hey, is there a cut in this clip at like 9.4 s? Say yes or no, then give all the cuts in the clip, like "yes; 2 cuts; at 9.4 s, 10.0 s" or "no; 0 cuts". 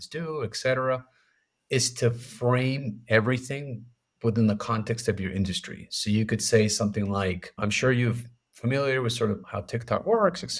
yes; 2 cuts; at 7.6 s, 9.4 s